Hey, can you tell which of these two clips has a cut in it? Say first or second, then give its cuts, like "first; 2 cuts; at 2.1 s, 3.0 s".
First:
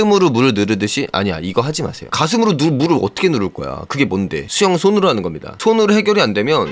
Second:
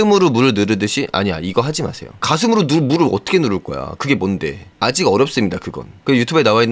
first; 2 cuts; at 2.0 s, 4.5 s